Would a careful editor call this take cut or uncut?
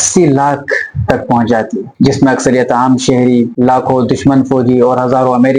uncut